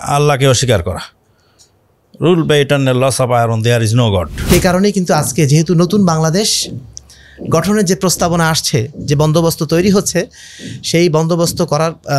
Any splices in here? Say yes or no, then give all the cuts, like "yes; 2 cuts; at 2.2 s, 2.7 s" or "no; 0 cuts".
yes; 1 cut; at 4.4 s